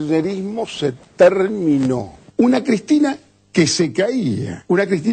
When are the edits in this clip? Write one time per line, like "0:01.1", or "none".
none